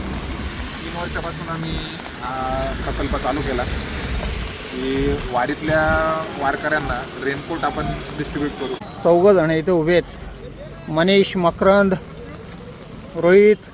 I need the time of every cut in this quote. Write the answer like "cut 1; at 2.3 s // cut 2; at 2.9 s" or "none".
cut 1; at 8.7 s